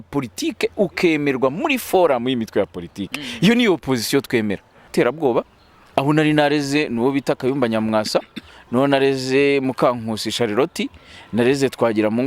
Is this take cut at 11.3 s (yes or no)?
no